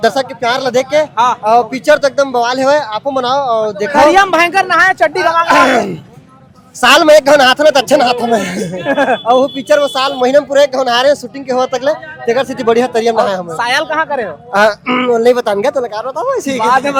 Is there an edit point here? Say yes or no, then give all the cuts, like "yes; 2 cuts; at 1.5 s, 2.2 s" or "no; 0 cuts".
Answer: no; 0 cuts